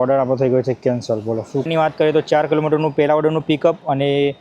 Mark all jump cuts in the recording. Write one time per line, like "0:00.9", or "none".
0:01.7